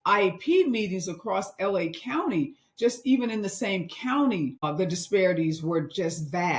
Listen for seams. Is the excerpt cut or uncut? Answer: cut